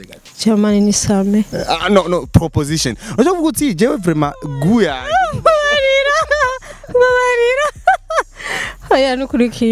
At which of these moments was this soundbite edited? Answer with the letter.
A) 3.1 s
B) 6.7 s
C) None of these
C